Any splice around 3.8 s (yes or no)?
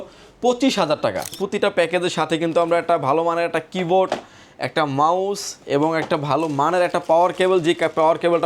no